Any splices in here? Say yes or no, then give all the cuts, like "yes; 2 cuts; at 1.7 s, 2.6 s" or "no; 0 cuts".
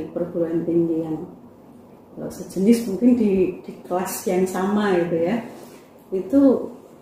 no; 0 cuts